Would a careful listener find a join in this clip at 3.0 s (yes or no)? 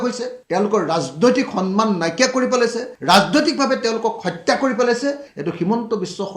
no